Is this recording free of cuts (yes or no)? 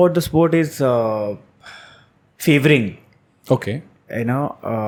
yes